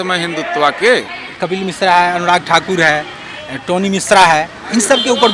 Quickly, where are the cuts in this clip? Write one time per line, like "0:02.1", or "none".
0:01.2

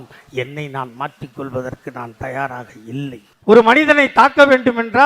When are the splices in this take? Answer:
0:03.3

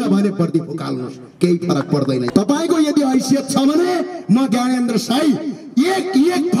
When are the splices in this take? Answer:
0:02.3

